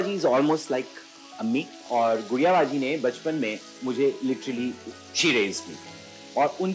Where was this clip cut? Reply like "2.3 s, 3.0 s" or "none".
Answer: 1.8 s